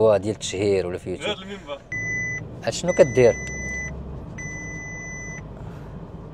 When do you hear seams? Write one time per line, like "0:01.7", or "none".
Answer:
0:01.9